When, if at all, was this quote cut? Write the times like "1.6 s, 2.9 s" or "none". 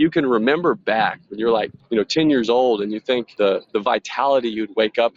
1.7 s, 3.3 s